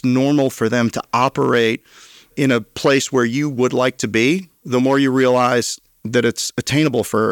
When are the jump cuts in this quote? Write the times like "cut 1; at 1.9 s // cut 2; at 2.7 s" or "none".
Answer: none